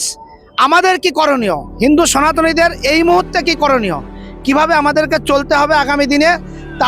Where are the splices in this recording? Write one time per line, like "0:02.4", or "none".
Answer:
none